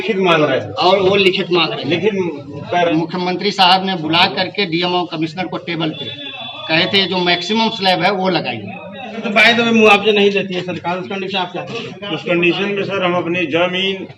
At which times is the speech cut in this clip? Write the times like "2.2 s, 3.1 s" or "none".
2.9 s, 9.2 s